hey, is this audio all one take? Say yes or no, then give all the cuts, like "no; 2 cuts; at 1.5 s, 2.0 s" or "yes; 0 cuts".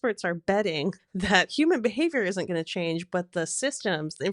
no; 1 cut; at 1.1 s